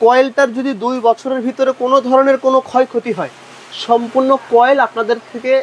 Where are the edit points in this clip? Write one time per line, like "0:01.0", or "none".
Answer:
none